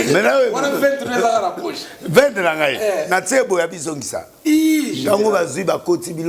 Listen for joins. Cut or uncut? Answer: uncut